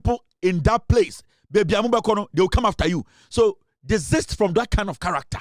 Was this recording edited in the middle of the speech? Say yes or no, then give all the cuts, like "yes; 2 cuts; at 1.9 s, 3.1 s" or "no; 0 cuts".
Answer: no; 0 cuts